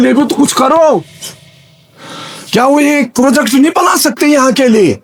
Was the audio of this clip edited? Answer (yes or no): no